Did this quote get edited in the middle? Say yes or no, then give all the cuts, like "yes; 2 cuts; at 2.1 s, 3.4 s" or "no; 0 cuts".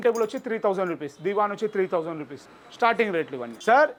no; 0 cuts